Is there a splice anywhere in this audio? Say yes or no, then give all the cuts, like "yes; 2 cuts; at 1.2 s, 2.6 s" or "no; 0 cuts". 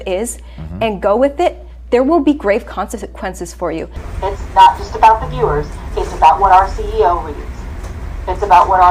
yes; 1 cut; at 4.1 s